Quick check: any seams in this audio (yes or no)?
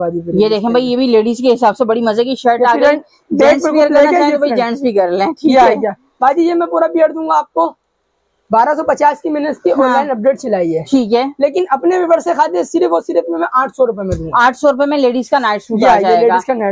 no